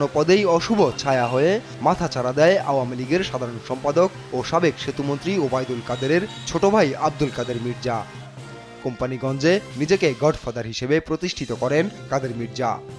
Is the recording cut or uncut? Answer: cut